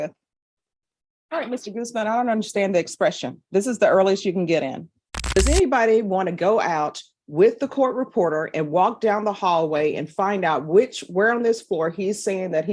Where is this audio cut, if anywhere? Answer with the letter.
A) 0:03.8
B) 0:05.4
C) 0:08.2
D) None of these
B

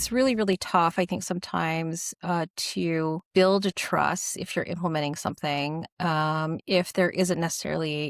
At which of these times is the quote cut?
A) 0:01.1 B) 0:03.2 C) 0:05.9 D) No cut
B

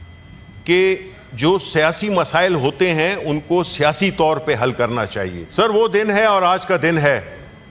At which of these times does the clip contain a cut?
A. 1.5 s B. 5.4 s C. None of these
B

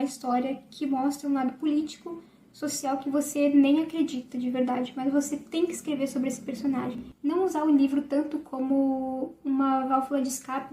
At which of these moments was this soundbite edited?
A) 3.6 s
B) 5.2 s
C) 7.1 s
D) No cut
C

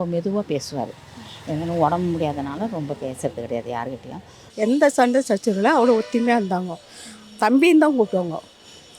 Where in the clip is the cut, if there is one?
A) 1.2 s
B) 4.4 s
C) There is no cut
B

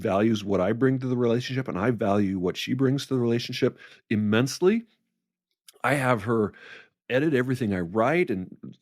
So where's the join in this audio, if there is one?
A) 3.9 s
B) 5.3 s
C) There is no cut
A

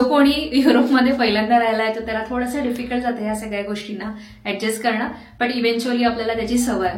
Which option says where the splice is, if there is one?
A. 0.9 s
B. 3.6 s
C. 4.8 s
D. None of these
D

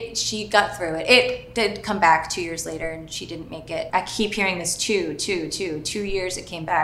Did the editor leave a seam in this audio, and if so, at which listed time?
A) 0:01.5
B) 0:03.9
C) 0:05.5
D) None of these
B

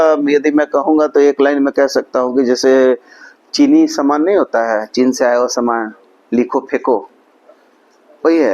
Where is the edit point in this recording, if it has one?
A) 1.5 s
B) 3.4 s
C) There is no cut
C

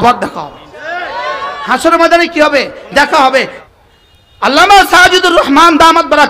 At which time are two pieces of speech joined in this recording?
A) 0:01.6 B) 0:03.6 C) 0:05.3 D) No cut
B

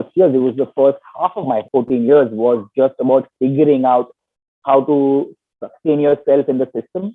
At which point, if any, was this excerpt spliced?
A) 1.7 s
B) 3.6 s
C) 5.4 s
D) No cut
A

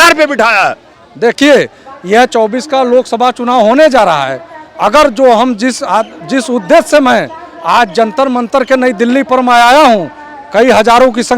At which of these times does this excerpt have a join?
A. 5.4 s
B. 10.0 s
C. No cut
C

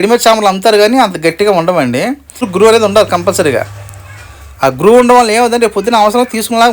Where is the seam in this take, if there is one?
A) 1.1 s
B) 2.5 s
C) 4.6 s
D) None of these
B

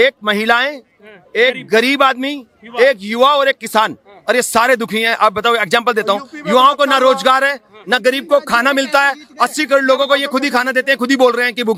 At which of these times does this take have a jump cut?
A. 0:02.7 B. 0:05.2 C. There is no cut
C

